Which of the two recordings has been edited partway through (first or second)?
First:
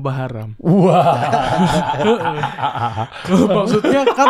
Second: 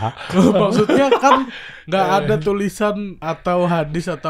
second